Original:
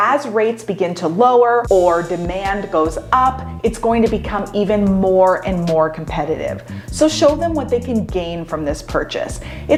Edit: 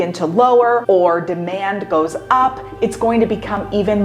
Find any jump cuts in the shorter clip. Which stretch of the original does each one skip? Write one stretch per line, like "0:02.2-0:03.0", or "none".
none